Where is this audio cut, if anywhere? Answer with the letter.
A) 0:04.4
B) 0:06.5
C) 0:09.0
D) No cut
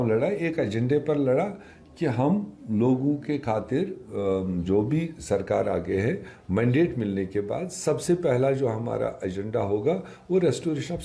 D